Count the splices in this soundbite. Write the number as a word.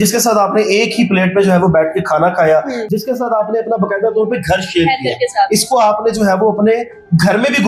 zero